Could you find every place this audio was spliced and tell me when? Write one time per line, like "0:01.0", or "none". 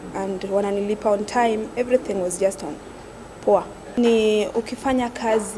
0:03.8